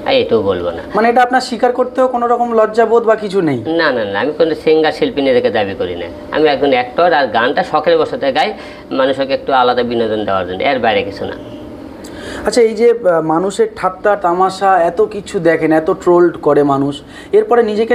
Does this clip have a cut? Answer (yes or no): no